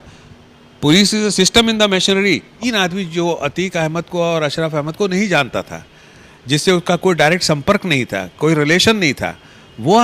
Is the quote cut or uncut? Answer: cut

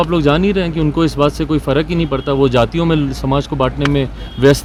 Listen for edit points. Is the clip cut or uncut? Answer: uncut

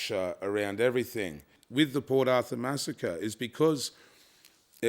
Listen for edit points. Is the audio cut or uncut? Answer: cut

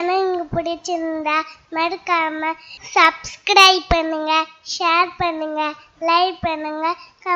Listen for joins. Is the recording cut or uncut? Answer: uncut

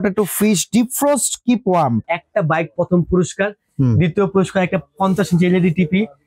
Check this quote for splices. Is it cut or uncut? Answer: cut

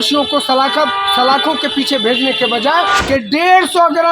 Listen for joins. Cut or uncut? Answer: cut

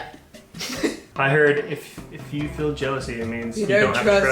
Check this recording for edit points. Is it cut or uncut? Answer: cut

